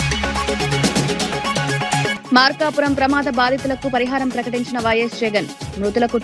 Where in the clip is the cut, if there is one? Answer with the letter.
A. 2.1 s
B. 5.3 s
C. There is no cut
A